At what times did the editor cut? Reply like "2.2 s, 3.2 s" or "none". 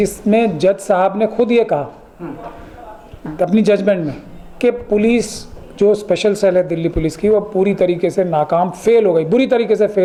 none